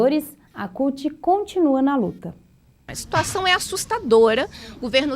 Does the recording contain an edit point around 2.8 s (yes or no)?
yes